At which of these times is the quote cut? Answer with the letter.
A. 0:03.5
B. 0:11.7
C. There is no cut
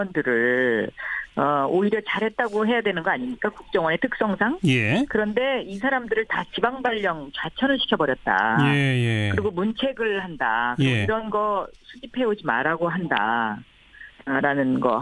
C